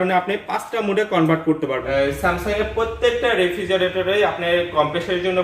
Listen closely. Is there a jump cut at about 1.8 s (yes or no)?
yes